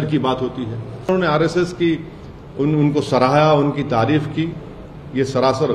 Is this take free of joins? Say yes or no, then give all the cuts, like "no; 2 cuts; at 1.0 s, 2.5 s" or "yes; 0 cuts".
no; 1 cut; at 1.1 s